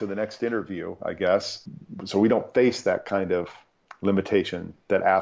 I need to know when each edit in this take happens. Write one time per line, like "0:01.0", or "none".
0:01.6
0:03.8